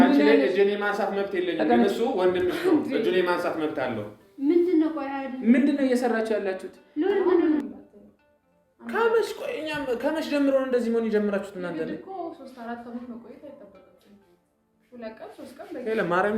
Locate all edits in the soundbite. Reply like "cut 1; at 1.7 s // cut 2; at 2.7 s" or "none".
cut 1; at 7.7 s